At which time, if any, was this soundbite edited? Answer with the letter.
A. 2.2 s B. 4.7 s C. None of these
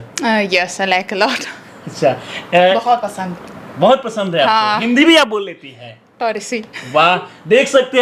C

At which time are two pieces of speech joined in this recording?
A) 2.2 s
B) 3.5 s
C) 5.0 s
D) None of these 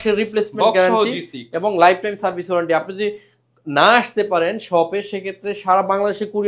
D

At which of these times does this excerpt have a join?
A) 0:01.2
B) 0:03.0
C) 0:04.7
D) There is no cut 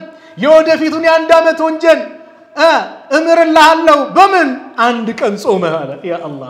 D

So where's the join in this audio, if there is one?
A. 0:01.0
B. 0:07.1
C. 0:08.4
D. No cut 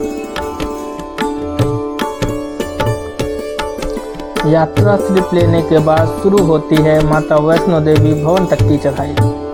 D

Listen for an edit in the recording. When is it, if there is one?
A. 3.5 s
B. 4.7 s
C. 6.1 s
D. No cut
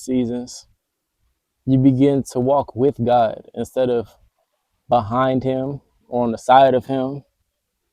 D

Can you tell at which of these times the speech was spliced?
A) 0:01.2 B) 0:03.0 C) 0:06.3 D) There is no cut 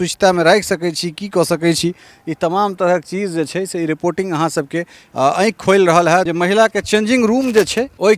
C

